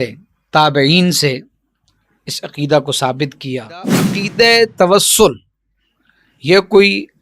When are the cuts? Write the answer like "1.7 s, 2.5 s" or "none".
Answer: 4.1 s